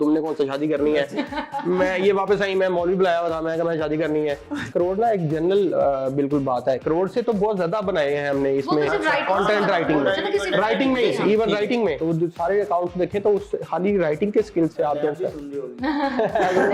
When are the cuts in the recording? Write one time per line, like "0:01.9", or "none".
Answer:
0:04.7
0:12.0